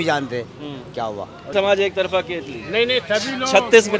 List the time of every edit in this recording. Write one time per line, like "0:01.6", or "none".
0:01.5